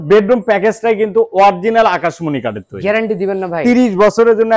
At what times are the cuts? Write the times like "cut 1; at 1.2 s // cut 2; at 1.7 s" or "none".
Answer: none